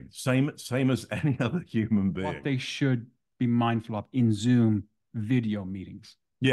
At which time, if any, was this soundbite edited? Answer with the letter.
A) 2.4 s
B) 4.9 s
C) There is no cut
A